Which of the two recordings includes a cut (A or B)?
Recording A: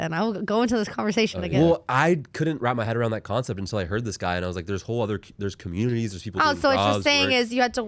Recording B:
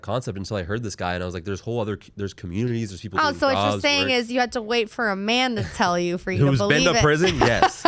A